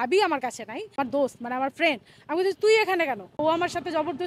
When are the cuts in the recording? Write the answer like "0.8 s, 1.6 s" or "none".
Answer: 1.0 s, 3.4 s